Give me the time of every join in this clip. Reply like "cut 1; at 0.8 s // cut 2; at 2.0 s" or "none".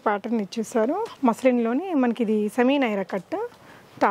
cut 1; at 1.1 s